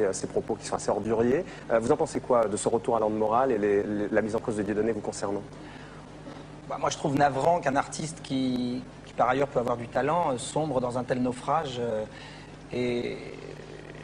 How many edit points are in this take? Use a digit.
1